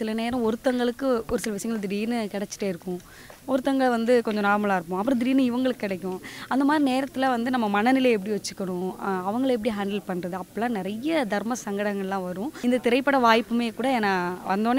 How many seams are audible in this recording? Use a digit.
1